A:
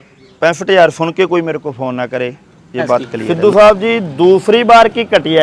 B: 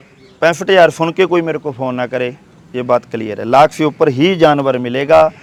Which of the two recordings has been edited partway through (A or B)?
A